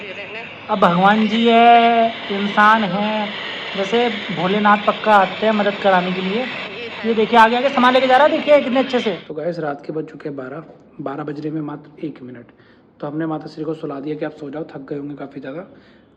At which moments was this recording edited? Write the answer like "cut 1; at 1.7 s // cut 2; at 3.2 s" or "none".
none

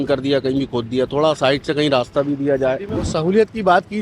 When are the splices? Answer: cut 1; at 3.1 s

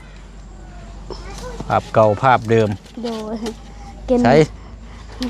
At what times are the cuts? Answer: none

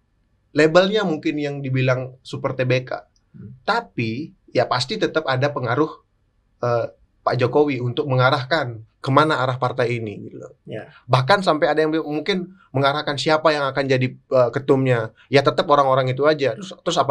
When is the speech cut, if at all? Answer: none

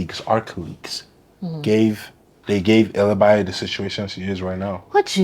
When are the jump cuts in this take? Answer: cut 1; at 2.3 s

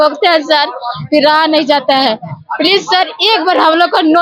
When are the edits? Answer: none

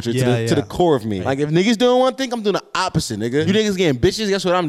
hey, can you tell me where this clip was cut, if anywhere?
cut 1; at 1.2 s // cut 2; at 3.5 s

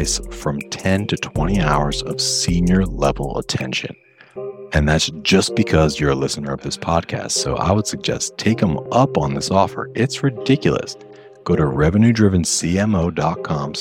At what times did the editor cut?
none

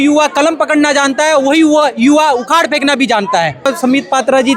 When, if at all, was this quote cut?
cut 1; at 3.7 s

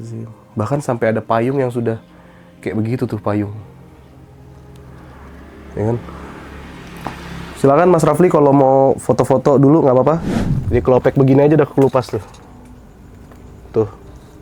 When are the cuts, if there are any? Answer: cut 1; at 10.3 s

